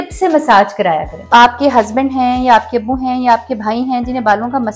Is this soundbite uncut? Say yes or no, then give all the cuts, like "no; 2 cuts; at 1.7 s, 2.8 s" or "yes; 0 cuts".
no; 1 cut; at 1.1 s